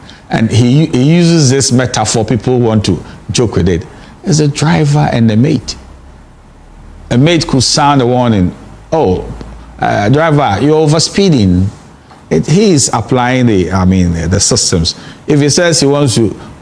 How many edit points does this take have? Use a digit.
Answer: 0